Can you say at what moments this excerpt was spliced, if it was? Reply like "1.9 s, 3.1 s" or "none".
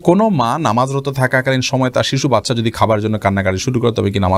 none